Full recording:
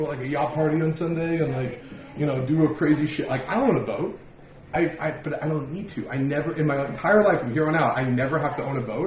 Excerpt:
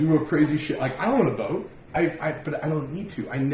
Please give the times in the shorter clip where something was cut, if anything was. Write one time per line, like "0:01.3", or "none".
0:01.8